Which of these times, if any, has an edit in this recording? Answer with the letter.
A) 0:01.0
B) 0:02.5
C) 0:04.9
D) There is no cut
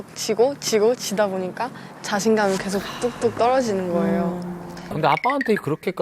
C